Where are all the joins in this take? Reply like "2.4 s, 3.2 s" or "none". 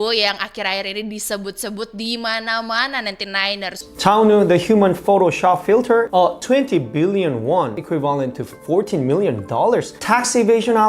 3.7 s